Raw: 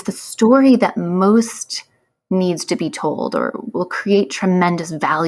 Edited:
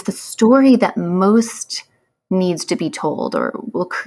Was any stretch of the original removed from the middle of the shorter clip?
no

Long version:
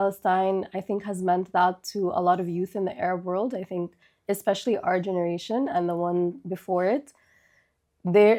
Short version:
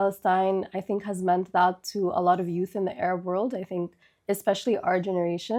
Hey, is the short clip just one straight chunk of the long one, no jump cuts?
yes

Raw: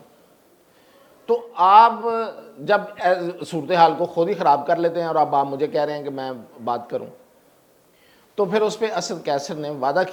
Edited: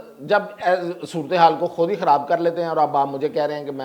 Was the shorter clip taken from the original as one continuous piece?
yes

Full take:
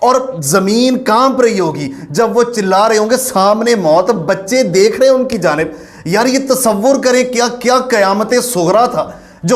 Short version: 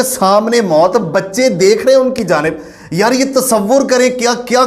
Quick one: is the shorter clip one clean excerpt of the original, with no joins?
yes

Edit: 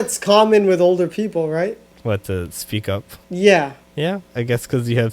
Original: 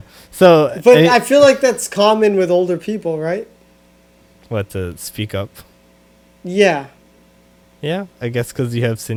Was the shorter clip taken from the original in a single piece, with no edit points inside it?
no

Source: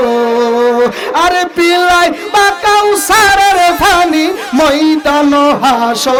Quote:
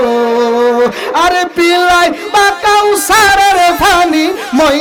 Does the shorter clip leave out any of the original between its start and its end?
no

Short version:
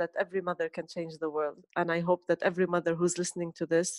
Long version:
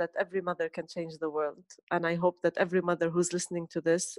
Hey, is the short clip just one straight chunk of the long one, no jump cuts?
no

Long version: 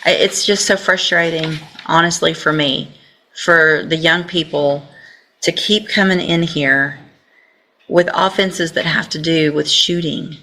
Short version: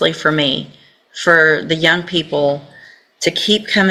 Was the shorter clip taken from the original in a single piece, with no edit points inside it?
yes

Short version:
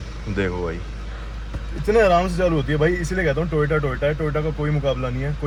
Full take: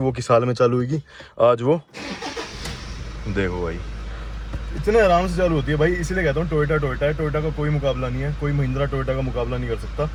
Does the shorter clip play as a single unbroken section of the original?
yes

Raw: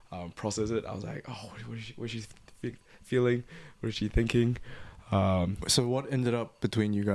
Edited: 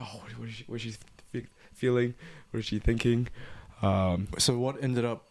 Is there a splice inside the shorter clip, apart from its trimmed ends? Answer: no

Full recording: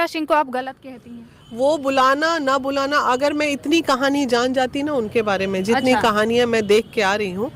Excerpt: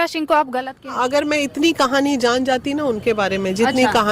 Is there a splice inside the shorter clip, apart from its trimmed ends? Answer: yes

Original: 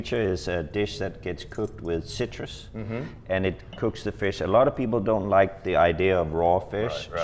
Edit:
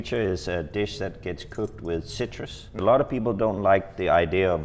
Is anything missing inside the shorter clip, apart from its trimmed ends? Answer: yes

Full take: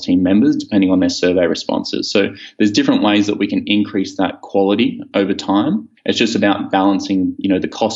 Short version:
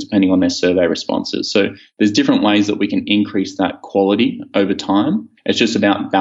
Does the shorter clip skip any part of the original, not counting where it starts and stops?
no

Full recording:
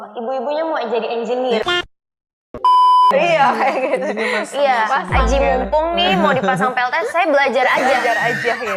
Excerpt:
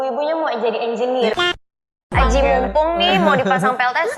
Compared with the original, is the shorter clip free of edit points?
no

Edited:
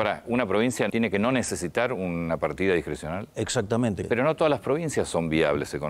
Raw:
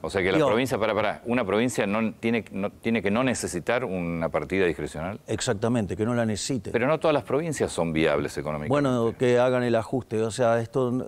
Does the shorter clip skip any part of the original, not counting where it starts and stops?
yes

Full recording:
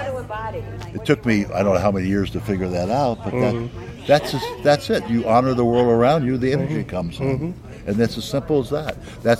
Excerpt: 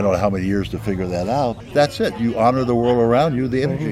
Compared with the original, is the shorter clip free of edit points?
no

